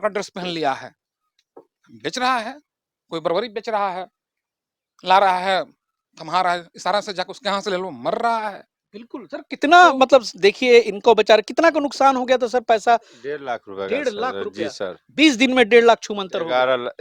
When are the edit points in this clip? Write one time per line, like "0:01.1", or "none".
none